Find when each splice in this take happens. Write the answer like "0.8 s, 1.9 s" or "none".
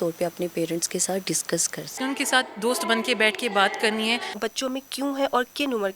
1.9 s, 4.3 s

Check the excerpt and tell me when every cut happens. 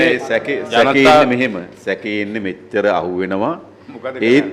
none

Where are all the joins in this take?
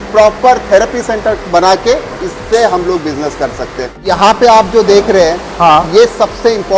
3.9 s

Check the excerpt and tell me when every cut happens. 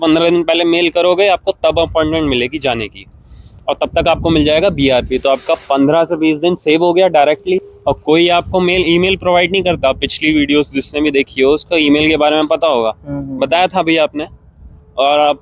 none

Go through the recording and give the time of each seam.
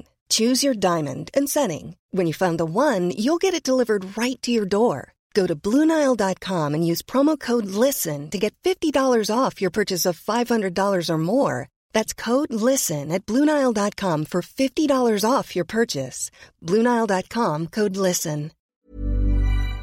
18.7 s

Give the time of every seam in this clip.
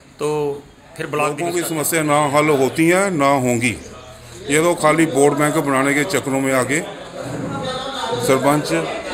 1.4 s

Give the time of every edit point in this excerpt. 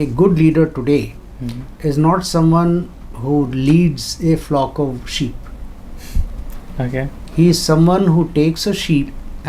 none

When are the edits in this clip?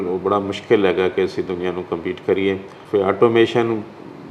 2.7 s

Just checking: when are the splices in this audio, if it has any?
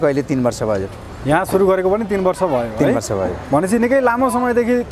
none

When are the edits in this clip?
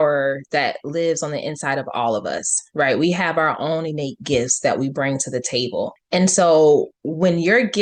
none

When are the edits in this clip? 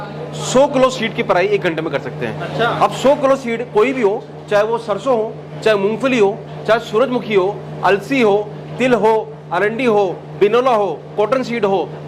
none

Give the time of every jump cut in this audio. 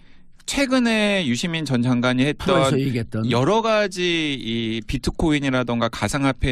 4.2 s

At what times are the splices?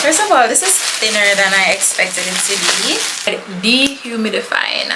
3.2 s

